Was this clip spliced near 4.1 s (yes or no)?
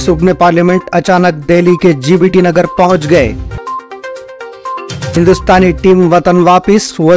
no